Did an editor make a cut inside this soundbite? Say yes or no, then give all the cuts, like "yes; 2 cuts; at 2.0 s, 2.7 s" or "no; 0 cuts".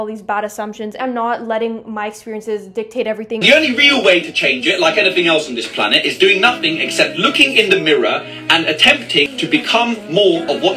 yes; 3 cuts; at 0.9 s, 3.4 s, 9.3 s